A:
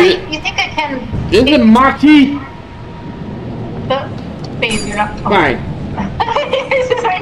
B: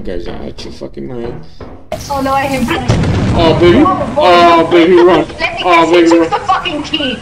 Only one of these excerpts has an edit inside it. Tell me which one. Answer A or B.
B